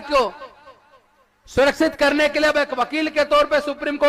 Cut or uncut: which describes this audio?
uncut